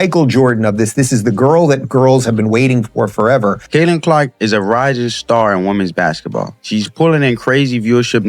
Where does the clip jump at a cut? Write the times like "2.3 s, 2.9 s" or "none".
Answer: 3.6 s, 6.6 s